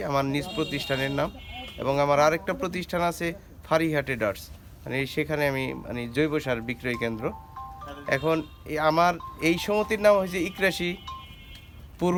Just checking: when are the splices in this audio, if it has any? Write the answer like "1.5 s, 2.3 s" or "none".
none